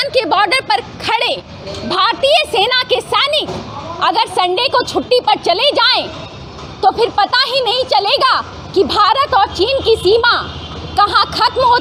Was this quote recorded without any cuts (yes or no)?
yes